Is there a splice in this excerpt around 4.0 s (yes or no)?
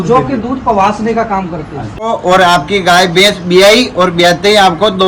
no